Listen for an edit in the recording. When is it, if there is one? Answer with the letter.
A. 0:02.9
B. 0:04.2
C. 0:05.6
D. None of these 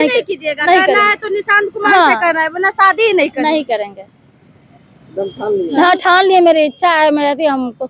D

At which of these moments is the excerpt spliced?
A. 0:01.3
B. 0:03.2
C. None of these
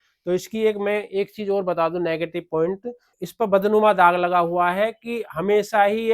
B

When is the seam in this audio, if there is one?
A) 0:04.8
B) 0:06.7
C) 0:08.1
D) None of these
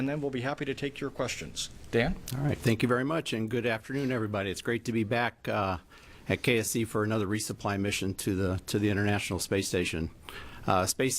A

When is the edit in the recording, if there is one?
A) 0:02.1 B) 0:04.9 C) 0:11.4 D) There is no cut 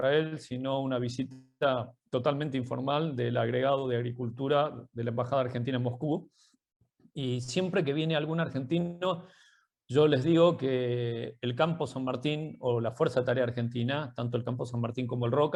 D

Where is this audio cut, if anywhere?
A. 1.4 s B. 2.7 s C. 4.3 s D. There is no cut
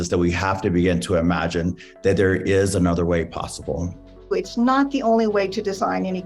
C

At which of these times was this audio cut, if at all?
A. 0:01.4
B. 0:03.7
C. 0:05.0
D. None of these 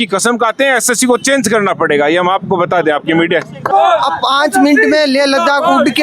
B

